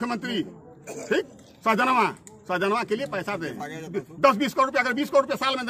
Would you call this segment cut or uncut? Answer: uncut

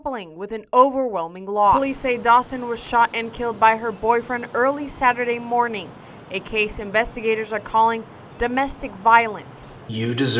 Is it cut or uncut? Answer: cut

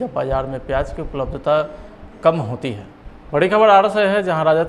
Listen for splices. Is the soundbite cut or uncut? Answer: cut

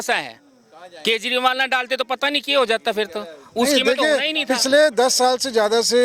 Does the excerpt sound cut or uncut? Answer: uncut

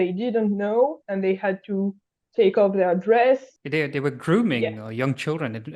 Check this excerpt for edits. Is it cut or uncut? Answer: cut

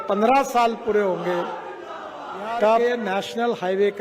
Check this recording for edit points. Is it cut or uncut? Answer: cut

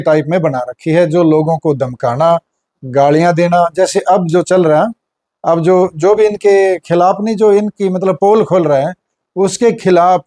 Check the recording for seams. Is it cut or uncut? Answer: uncut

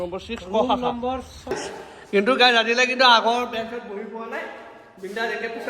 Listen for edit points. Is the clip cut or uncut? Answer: cut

